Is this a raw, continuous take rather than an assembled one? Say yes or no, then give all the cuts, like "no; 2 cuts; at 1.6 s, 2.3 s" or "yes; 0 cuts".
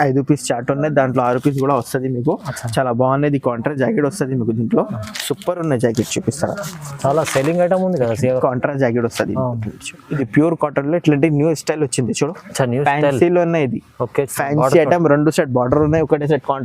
no; 1 cut; at 10.0 s